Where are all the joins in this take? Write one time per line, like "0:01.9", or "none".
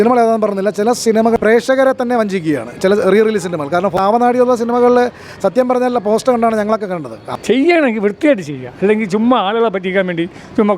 0:01.2
0:03.9
0:07.3